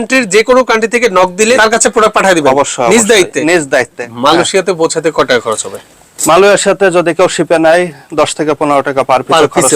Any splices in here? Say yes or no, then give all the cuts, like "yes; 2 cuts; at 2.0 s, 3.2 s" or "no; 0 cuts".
yes; 2 cuts; at 1.6 s, 4.0 s